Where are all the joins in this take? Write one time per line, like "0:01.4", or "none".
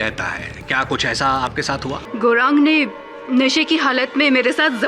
0:02.0